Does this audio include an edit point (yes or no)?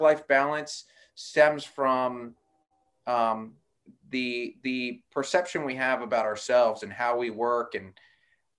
no